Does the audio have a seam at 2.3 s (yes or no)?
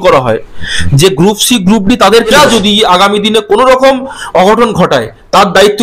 yes